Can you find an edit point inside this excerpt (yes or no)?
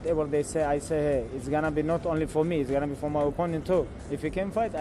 no